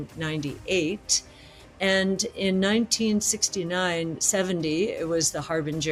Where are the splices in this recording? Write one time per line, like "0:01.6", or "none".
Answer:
none